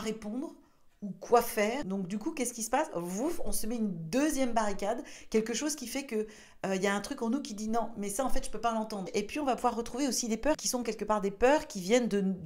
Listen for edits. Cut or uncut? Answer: uncut